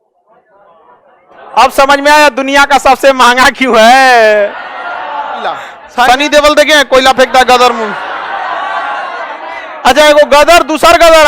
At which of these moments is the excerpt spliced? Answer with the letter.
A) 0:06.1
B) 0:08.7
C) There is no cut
A